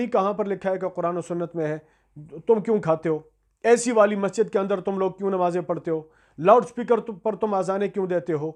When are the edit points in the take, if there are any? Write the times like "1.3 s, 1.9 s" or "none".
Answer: none